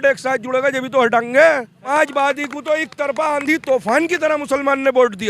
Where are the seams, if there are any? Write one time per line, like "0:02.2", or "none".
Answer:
0:01.9